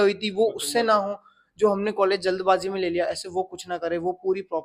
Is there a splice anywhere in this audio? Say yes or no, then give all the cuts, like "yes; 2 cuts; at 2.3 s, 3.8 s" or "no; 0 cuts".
no; 0 cuts